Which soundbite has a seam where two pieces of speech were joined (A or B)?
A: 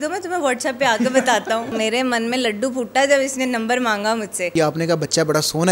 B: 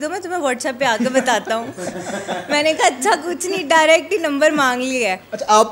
A